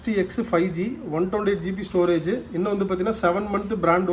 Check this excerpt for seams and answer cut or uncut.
uncut